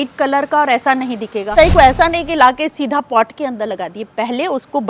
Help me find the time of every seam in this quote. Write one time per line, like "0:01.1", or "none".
0:01.5